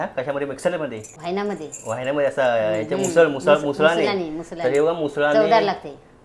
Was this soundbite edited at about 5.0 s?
no; 1 cut; at 1.1 s

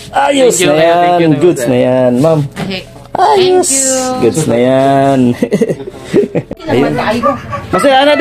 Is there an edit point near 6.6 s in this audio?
yes; 1 cut; at 6.6 s

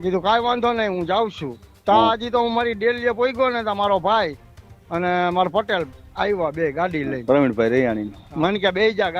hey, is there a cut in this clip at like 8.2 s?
yes; 1 cut; at 8.2 s

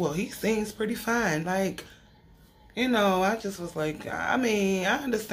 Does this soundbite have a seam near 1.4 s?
no; 0 cuts

